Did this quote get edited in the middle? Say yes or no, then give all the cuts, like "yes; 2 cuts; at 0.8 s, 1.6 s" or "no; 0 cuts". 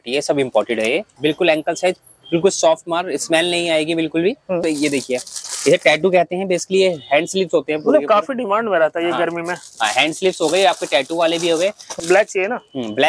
yes; 3 cuts; at 1.1 s, 4.6 s, 11.9 s